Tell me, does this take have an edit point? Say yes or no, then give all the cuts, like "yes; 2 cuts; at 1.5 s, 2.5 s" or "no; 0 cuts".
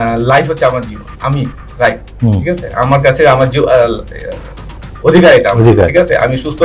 no; 0 cuts